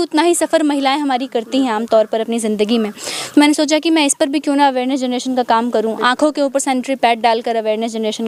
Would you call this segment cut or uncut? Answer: uncut